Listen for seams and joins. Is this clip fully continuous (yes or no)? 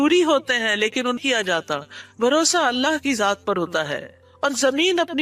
no